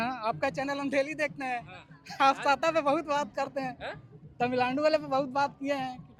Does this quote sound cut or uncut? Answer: uncut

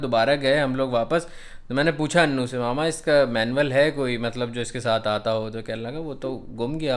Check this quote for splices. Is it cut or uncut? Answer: uncut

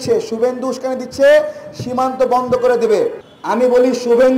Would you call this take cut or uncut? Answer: cut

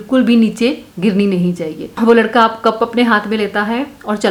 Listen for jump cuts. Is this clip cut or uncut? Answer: uncut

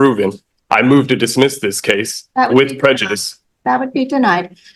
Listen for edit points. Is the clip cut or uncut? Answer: uncut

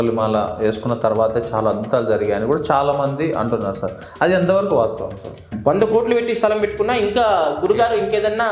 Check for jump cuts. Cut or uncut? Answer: cut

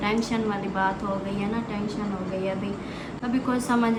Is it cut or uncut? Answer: uncut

